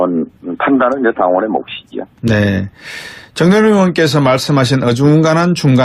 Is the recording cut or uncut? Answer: cut